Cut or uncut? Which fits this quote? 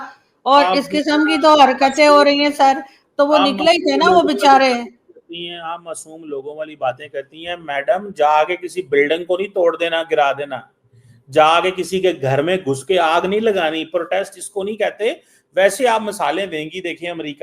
uncut